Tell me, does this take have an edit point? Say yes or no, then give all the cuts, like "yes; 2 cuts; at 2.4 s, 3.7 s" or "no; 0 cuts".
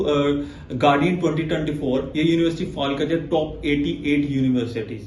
no; 0 cuts